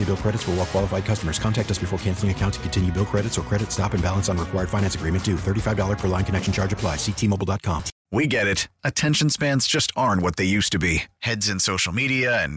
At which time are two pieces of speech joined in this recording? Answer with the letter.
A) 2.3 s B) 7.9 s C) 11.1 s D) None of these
B